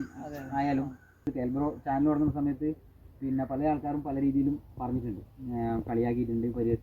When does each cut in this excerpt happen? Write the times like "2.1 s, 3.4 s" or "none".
1.3 s